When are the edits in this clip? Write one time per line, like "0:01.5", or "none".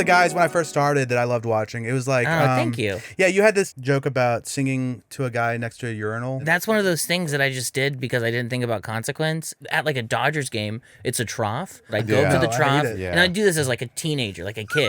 0:03.7
0:06.4
0:09.6
0:11.9